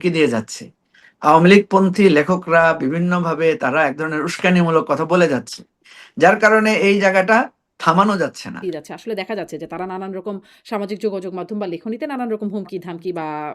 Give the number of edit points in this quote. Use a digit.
1